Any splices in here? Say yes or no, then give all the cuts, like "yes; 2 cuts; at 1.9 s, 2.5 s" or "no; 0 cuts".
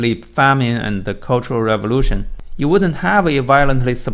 no; 0 cuts